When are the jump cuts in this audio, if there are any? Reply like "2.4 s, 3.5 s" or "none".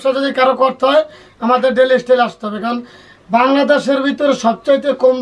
none